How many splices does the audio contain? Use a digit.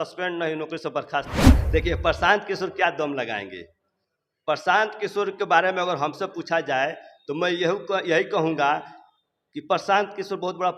1